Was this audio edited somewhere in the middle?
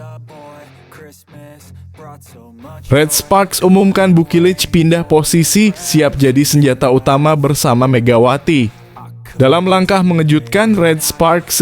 yes; 1 cut; at 2.9 s

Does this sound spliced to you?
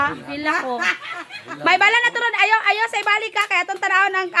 no; 0 cuts

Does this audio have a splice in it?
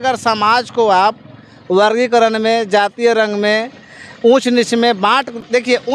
no; 0 cuts

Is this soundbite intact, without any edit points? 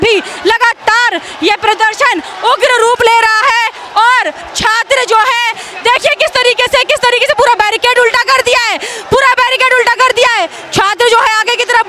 yes; 0 cuts

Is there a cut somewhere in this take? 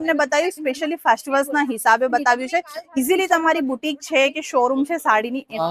no; 0 cuts

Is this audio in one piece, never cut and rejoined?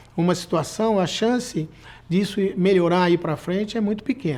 yes; 0 cuts

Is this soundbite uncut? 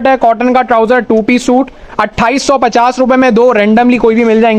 yes; 0 cuts

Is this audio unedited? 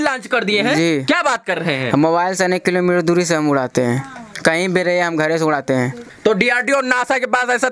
no; 1 cut; at 6.0 s

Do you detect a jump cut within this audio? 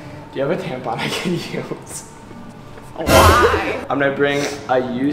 yes; 1 cut; at 3.8 s

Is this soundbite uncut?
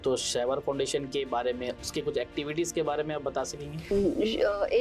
no; 1 cut; at 3.9 s

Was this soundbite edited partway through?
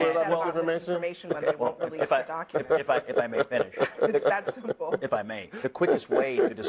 no; 0 cuts

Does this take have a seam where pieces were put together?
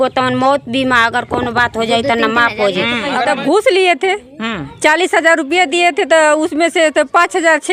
yes; 1 cut; at 3.2 s

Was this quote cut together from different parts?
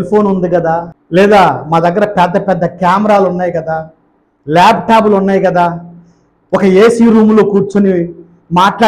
yes; 1 cut; at 1.0 s

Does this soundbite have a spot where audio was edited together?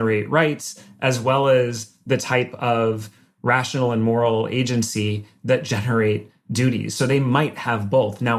no; 0 cuts

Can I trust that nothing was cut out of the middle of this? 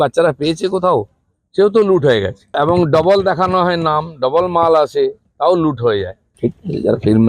no; 2 cuts; at 2.5 s, 6.2 s

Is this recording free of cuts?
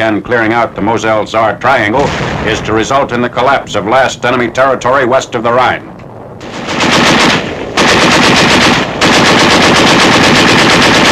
yes; 0 cuts

